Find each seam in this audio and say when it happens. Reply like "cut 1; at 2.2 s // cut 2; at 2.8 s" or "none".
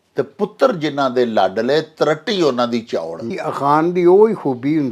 cut 1; at 3.3 s